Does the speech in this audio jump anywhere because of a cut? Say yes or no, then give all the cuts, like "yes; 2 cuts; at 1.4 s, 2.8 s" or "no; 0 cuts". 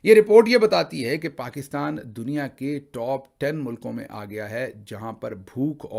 no; 0 cuts